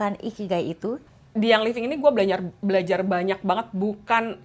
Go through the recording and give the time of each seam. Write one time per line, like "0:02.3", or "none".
0:01.0